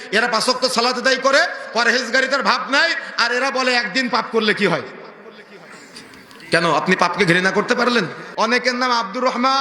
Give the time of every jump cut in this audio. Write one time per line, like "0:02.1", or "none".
0:08.2